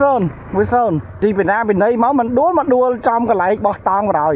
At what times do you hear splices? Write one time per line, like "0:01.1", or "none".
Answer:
0:01.1

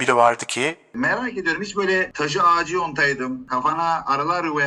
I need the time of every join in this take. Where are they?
0:00.9
0:02.1
0:03.4

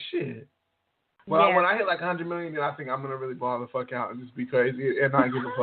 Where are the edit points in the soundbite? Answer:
0:01.1

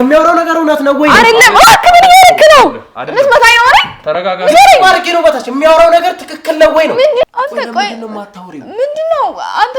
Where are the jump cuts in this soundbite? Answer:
0:07.2

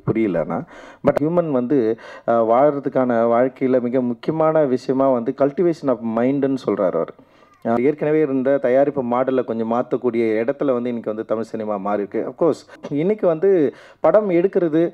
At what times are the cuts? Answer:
0:01.1
0:07.8
0:12.8

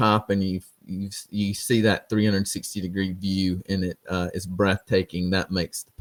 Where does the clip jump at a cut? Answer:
none

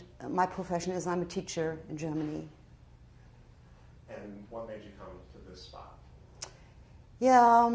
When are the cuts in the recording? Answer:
0:01.0

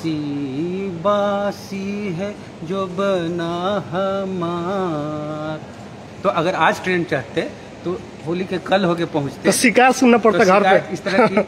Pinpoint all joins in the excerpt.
0:06.0

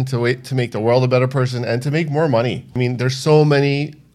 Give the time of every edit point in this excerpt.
0:02.7

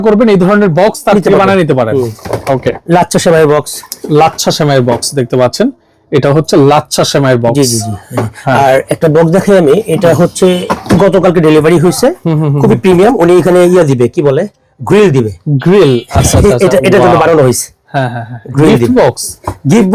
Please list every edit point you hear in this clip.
none

